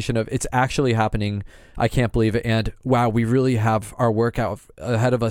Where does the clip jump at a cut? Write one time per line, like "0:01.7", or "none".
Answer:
none